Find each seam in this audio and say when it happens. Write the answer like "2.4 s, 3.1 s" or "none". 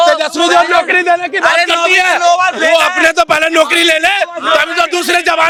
none

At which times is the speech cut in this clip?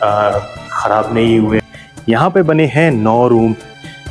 1.6 s

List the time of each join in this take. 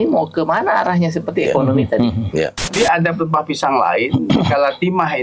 2.7 s

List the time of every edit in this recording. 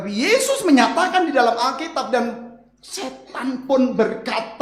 none

